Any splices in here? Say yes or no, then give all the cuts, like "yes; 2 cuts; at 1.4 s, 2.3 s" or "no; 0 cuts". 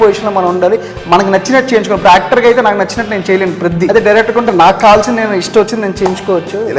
yes; 1 cut; at 3.9 s